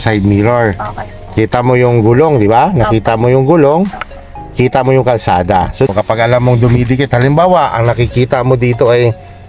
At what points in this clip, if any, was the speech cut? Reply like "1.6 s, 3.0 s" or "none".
none